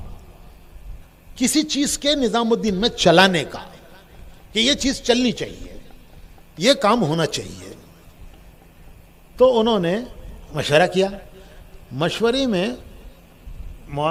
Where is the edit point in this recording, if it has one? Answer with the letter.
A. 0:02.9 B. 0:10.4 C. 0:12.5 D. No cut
D